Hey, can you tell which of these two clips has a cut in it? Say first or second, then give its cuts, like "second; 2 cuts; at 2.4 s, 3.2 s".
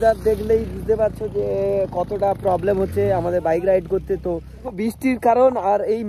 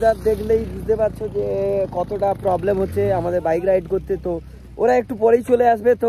first; 1 cut; at 4.7 s